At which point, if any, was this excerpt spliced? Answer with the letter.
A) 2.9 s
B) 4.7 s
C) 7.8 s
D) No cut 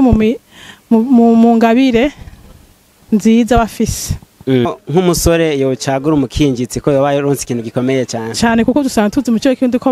B